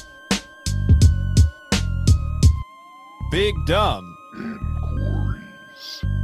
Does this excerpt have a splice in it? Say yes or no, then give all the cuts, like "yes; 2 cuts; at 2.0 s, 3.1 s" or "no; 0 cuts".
yes; 1 cut; at 2.2 s